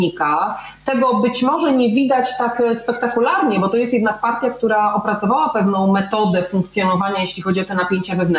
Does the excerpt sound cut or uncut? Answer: uncut